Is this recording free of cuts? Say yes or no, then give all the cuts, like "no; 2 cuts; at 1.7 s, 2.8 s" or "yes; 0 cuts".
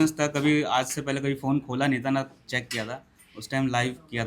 yes; 0 cuts